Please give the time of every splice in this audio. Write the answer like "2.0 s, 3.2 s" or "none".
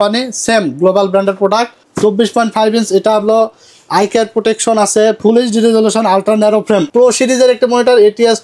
1.8 s, 6.9 s